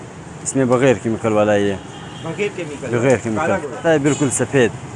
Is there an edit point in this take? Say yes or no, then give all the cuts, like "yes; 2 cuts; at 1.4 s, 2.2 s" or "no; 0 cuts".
yes; 1 cut; at 3.8 s